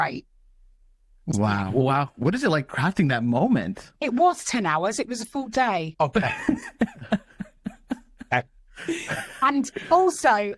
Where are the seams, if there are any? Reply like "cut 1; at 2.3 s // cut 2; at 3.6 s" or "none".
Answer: none